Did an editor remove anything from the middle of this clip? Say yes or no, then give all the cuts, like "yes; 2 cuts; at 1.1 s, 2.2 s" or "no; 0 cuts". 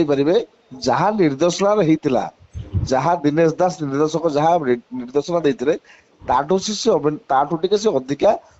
no; 0 cuts